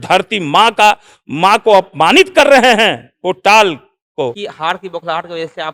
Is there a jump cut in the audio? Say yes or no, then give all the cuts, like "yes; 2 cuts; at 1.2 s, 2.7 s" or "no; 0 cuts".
yes; 1 cut; at 4.5 s